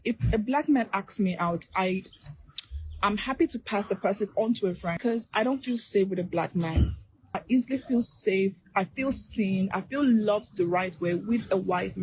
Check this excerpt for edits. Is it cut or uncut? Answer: cut